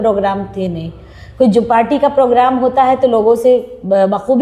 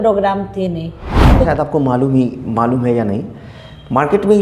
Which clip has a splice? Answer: second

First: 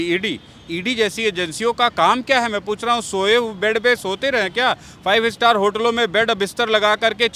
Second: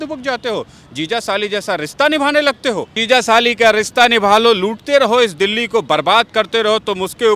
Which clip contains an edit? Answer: second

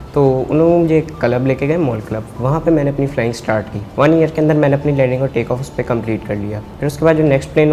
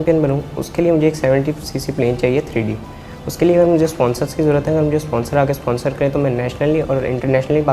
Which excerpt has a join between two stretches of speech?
first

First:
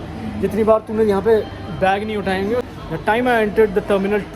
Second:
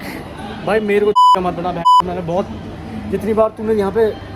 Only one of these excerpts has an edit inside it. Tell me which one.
first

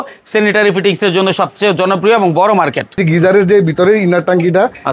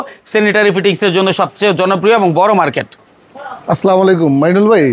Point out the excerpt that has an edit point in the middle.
first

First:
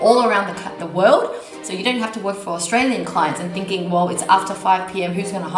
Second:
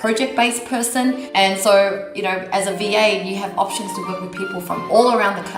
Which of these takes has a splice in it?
second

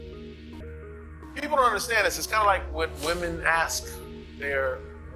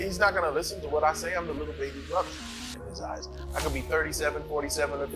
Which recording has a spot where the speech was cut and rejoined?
first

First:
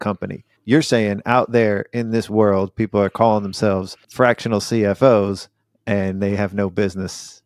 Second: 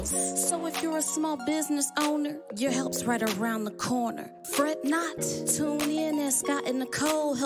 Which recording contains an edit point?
first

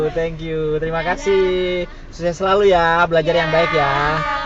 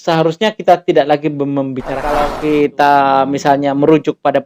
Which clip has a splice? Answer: second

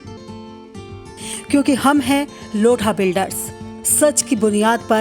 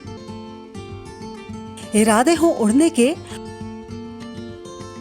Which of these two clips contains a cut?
first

